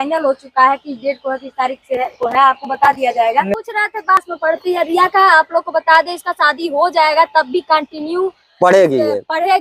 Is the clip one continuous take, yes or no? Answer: no